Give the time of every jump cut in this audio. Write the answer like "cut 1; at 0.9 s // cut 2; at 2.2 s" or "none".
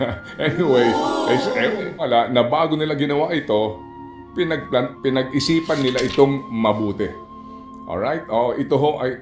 cut 1; at 2.0 s